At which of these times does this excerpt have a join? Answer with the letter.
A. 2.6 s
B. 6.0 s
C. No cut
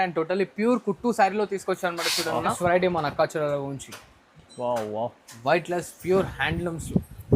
A